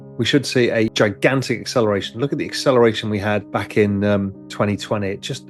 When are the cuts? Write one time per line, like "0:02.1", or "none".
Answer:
0:00.9
0:03.5
0:04.4